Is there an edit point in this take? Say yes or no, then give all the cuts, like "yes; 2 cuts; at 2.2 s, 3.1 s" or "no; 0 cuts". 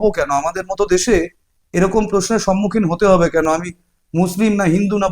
no; 0 cuts